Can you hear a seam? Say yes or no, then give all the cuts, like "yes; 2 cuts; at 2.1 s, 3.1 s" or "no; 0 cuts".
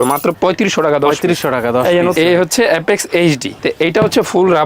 yes; 2 cuts; at 2.1 s, 3.6 s